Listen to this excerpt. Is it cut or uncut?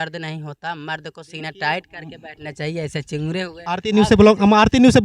cut